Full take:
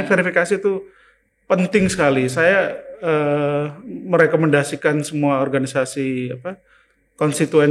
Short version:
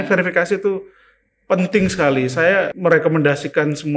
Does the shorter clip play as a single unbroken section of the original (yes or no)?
no